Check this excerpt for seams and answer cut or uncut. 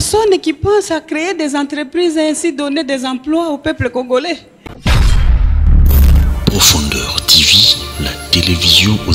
cut